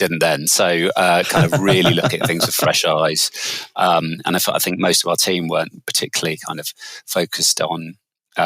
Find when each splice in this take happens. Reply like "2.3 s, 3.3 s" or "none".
none